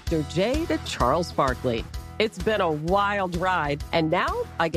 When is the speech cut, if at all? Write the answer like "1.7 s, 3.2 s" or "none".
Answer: none